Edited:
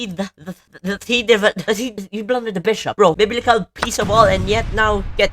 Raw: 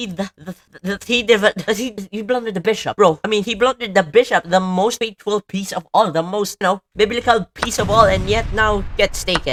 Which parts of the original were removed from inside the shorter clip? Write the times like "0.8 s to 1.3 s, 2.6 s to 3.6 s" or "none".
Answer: 3.1 s to 6.9 s